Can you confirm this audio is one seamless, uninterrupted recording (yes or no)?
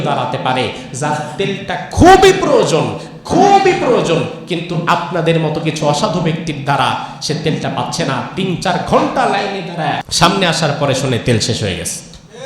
no